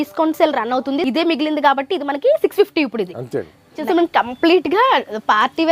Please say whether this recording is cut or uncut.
cut